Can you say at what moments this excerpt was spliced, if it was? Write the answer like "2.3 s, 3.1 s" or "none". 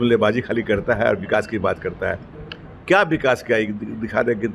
none